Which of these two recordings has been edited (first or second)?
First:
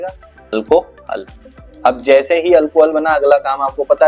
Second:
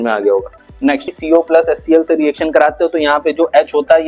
second